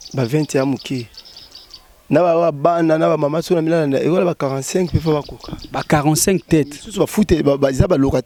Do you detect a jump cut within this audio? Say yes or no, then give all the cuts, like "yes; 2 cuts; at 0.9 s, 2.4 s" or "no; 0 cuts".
no; 0 cuts